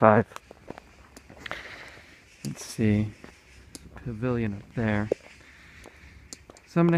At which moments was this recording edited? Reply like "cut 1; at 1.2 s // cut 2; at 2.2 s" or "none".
cut 1; at 2.4 s